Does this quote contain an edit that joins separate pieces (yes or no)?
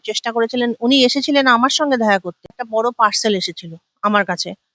yes